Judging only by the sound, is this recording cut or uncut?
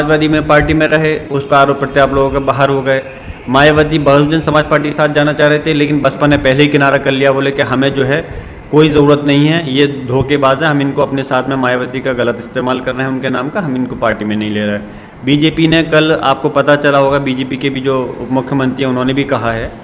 uncut